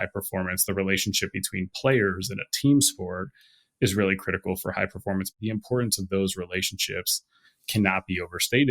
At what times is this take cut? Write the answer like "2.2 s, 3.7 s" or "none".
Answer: 5.3 s